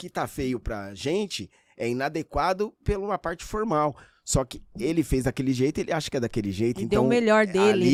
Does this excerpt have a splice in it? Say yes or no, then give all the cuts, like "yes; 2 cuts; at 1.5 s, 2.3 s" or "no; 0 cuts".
no; 0 cuts